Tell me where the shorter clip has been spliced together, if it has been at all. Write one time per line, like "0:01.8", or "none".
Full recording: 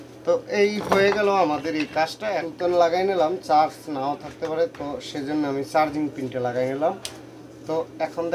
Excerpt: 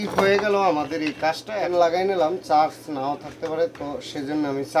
0:01.6